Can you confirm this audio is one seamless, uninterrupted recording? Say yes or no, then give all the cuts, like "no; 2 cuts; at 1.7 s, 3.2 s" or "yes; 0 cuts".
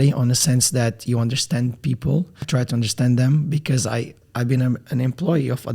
no; 2 cuts; at 2.5 s, 4.2 s